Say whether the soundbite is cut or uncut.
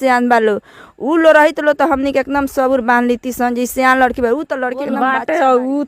cut